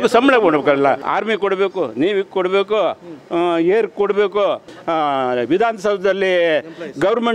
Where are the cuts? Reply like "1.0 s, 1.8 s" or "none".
1.1 s, 4.7 s